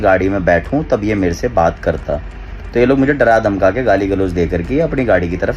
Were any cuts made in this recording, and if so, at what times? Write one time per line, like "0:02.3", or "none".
none